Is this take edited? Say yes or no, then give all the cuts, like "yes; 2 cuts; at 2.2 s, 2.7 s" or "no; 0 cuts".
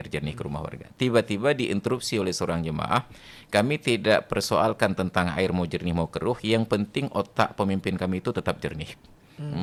no; 0 cuts